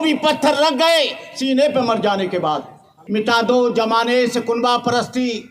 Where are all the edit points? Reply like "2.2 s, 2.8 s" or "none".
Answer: 3.0 s